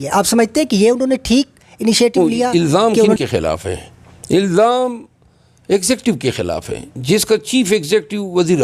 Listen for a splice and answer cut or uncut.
cut